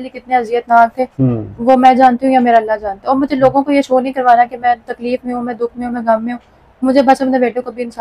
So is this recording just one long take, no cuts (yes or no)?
yes